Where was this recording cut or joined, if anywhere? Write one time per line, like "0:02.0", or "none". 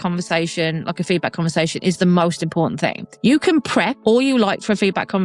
0:03.0
0:03.9